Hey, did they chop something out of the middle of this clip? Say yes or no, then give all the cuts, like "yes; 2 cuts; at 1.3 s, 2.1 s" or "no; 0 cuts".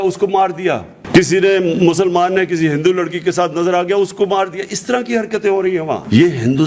no; 0 cuts